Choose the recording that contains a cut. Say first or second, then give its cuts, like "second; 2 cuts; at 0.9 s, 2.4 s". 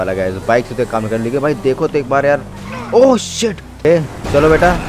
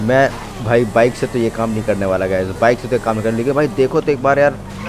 first; 1 cut; at 3.8 s